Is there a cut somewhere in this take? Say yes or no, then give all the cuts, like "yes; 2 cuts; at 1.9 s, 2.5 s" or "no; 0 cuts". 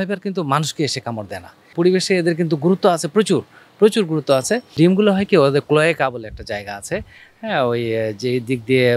yes; 2 cuts; at 1.7 s, 4.7 s